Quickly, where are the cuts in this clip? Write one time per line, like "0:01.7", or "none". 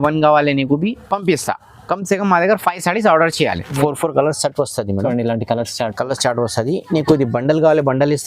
0:03.8